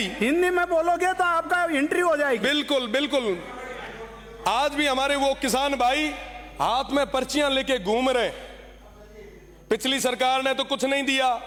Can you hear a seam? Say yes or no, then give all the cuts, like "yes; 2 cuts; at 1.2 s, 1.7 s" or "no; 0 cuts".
no; 0 cuts